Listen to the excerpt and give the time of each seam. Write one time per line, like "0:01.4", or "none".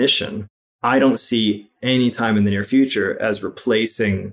none